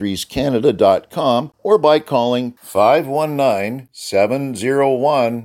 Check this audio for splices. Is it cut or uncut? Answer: cut